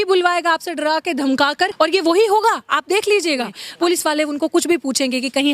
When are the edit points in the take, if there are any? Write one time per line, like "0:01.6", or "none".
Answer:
0:01.7
0:03.6